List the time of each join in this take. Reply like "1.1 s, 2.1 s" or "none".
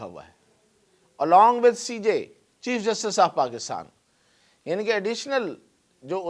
none